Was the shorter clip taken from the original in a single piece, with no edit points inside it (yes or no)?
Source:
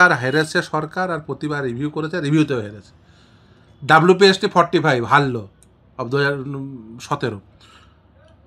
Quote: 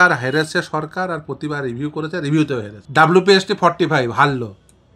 no